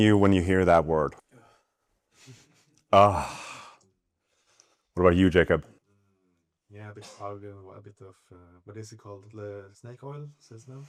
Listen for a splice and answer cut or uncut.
uncut